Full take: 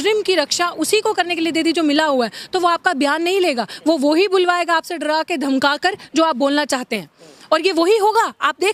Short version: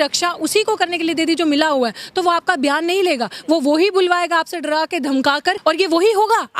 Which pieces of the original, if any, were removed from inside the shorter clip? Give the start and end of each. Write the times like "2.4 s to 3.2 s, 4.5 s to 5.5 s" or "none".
6.0 s to 7.4 s

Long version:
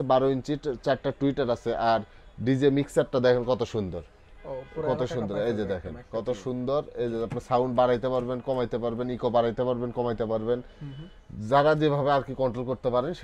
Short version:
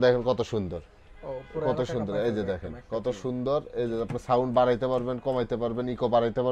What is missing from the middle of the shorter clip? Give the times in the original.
none

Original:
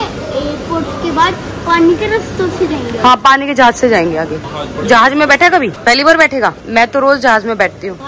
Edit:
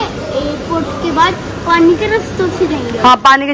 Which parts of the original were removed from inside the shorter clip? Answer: none

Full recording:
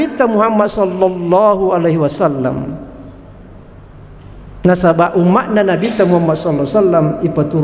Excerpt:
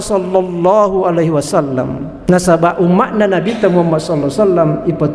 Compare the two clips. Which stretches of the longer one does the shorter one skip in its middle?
2.7 s to 4.4 s

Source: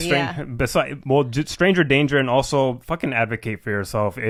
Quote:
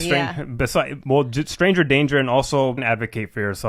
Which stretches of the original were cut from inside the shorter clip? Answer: 2.8 s to 3.1 s

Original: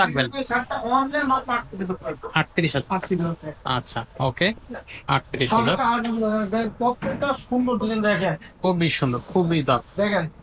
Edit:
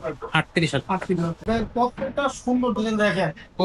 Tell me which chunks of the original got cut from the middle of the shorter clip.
3.4 s to 6.5 s

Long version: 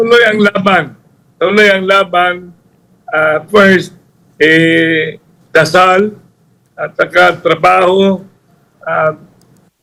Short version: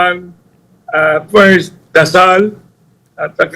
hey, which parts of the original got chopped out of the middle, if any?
4.0 s to 5.4 s

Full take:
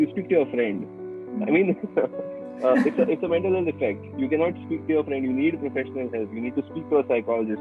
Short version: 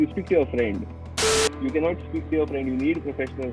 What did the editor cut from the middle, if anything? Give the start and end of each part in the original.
1.4 s to 3.9 s

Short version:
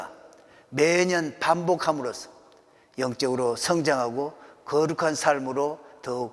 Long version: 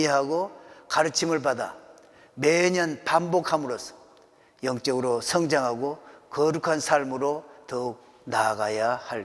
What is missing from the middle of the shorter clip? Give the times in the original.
none

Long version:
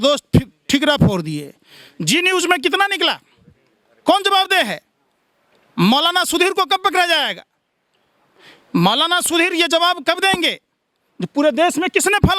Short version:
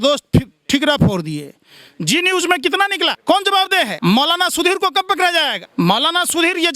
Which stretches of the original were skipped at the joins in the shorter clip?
3.2 s to 4.0 s, 4.7 s to 5.7 s, 7.4 s to 8.6 s

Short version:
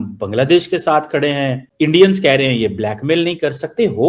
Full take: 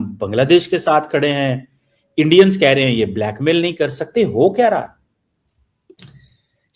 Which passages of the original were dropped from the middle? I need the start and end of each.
1.6 s to 1.9 s

